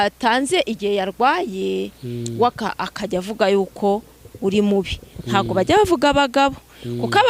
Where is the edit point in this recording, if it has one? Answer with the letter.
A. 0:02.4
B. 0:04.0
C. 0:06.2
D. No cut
D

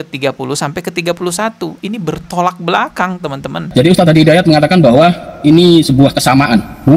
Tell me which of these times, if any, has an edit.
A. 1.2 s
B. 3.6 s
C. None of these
B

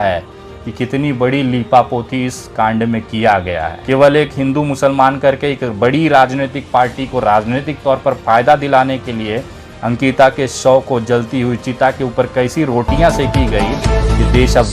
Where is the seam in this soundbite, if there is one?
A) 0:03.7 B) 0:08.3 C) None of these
A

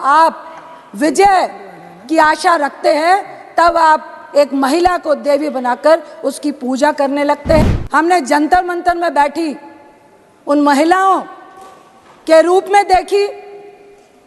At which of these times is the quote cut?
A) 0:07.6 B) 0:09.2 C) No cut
A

